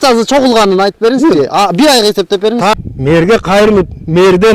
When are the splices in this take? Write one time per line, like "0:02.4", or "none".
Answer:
0:02.7